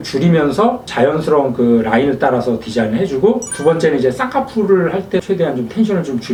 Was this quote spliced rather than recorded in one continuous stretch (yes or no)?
no